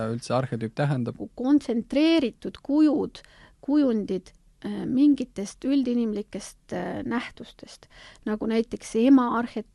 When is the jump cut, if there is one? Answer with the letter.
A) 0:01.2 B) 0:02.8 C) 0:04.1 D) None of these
A